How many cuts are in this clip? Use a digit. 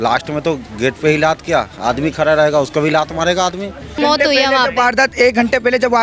1